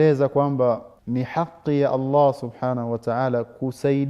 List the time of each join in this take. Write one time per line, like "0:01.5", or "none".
0:00.9